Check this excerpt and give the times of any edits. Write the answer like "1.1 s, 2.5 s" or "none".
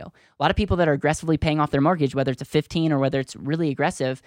none